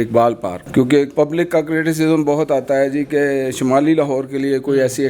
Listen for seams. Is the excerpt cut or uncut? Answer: cut